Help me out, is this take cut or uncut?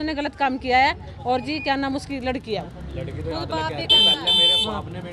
uncut